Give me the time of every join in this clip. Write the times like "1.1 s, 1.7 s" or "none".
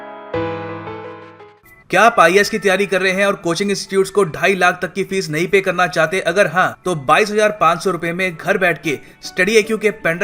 1.2 s